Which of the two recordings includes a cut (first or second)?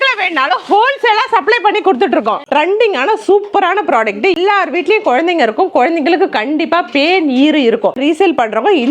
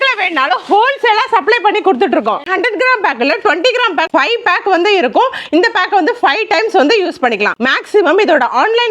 first